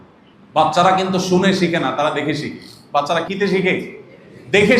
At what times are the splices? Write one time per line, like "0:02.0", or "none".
0:03.3